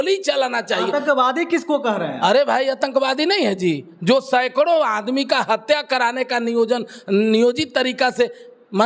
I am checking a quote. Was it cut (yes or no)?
no